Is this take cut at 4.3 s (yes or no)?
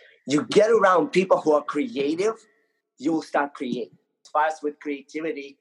yes